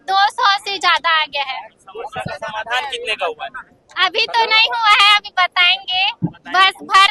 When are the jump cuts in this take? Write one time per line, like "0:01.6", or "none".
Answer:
none